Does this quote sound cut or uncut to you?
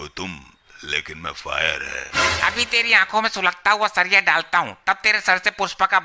uncut